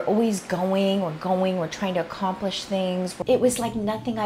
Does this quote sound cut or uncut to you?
cut